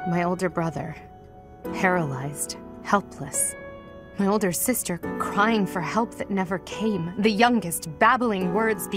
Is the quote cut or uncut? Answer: uncut